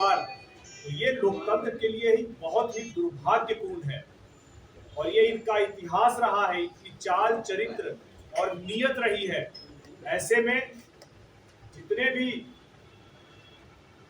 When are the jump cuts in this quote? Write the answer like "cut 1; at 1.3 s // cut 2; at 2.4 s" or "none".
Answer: none